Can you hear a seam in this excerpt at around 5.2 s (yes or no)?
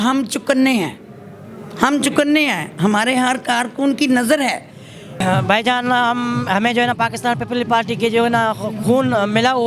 yes